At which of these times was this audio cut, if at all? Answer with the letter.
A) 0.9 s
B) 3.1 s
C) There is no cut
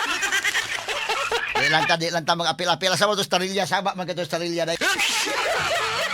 A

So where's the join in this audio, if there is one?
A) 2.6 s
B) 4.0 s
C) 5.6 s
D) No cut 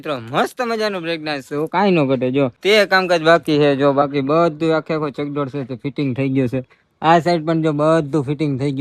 A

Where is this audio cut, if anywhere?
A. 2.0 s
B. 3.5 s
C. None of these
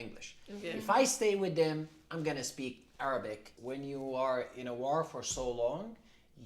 B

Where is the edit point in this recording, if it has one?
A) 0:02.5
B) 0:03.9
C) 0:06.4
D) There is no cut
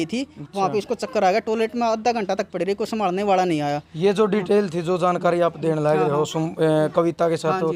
D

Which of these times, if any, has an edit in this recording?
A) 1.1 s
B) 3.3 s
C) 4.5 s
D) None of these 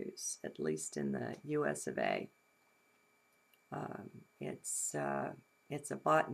A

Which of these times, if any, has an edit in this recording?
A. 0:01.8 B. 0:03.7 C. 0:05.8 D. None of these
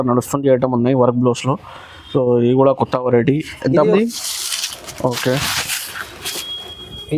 B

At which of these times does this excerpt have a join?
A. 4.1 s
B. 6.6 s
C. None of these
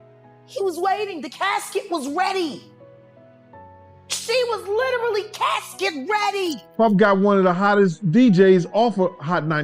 B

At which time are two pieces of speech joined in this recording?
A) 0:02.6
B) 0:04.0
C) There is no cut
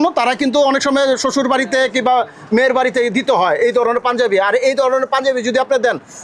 C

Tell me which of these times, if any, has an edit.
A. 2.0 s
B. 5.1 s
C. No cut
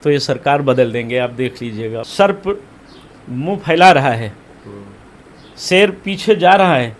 A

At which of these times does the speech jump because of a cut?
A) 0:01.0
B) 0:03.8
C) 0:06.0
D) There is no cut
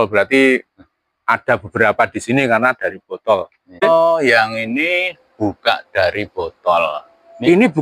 B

